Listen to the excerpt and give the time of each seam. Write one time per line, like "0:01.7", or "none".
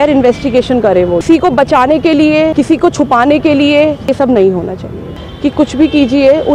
0:01.2
0:02.5
0:04.1
0:05.1